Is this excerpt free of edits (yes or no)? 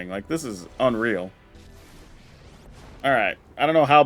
no